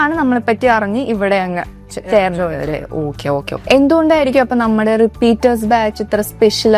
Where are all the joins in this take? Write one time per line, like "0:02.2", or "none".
none

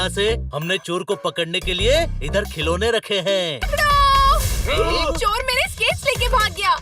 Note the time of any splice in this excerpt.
0:03.7

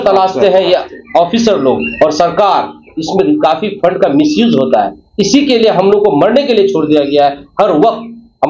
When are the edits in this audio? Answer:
none

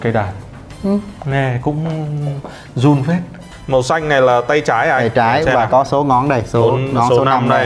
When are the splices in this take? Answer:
0:01.2
0:03.4

